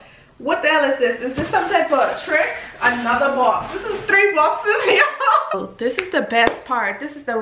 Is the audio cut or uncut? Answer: cut